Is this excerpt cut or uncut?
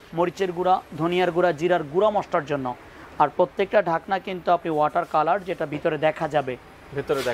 uncut